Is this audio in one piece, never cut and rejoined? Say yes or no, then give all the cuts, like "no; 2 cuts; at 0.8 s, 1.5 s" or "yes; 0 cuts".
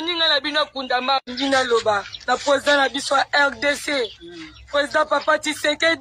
no; 1 cut; at 1.2 s